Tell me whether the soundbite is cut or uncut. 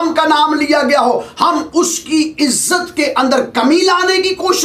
uncut